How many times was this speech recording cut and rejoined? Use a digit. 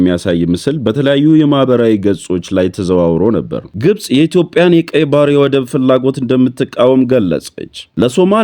1